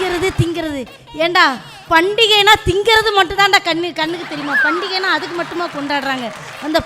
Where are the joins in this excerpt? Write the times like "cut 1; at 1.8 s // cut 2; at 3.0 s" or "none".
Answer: none